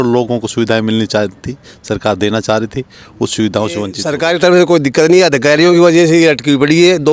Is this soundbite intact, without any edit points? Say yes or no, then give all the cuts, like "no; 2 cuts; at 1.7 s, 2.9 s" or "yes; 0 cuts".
no; 1 cut; at 4.0 s